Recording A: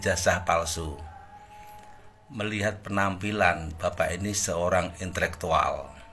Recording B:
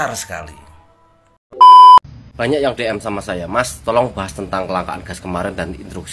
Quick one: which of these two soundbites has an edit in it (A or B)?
B